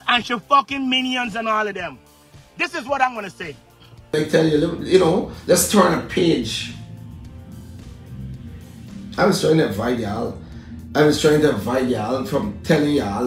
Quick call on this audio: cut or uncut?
cut